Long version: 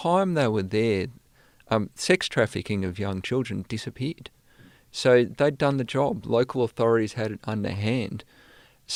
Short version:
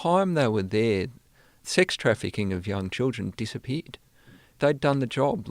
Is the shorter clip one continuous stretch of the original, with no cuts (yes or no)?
no